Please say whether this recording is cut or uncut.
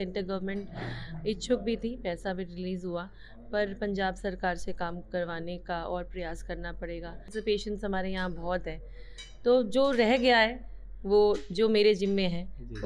cut